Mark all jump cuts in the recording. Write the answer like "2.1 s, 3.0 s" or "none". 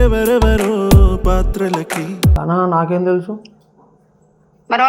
2.4 s